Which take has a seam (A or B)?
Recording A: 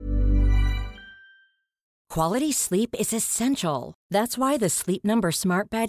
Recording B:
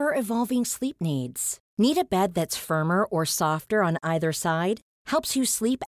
A